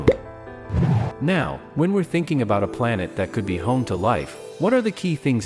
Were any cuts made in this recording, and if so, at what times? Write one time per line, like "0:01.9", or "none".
0:01.1